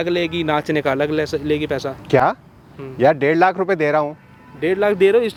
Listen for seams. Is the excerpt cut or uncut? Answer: uncut